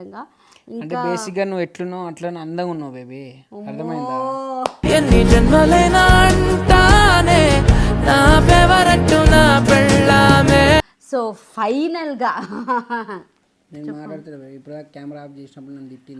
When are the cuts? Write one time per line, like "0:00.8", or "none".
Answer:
0:11.0